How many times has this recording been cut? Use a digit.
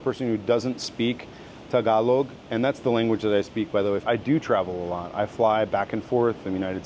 1